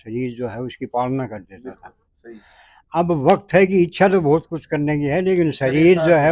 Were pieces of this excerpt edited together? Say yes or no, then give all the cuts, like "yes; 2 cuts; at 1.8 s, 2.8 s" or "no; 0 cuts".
no; 0 cuts